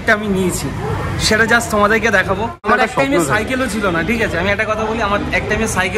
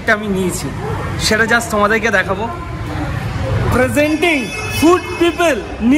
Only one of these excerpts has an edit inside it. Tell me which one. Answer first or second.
first